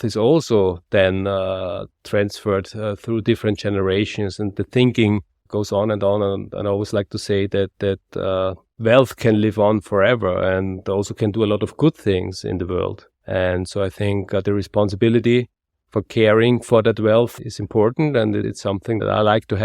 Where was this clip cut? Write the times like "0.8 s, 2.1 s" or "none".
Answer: 17.3 s, 18.8 s